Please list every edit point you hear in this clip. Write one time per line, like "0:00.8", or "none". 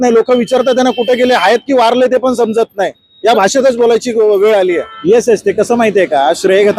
0:04.9